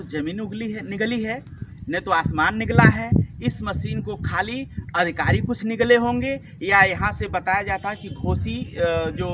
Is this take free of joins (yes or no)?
yes